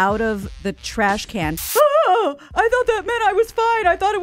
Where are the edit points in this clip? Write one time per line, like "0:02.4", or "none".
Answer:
0:01.6